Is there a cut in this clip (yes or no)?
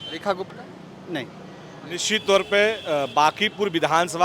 yes